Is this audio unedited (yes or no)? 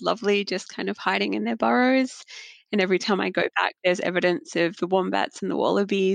yes